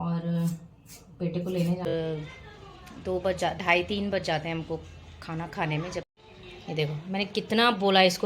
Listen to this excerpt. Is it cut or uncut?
cut